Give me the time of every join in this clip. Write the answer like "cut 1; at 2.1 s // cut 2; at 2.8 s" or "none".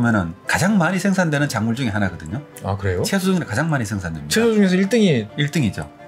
none